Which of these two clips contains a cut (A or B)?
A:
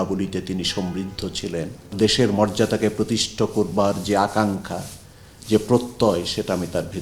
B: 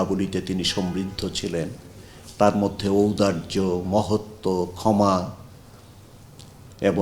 A